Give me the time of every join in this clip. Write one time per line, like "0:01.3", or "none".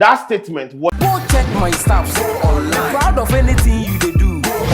0:00.9